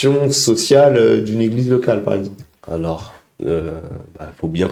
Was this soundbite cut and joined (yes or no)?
no